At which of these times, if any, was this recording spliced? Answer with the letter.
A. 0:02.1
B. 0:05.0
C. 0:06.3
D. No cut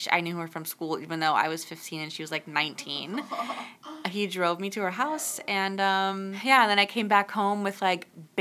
C